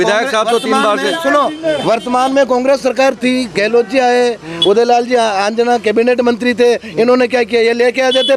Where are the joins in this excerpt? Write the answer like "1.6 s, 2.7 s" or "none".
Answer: none

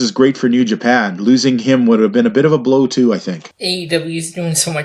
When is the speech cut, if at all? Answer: 3.5 s

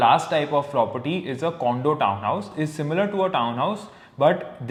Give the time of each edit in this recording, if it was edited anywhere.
none

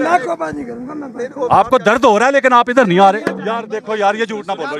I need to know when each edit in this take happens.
3.3 s

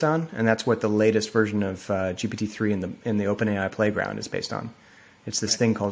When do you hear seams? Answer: none

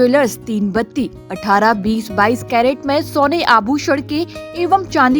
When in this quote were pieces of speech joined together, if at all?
none

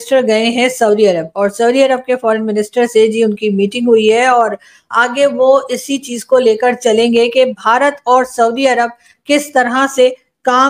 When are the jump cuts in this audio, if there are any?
none

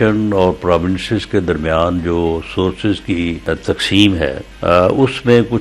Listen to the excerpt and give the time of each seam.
3.4 s, 4.5 s

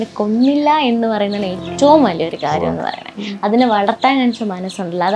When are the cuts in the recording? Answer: none

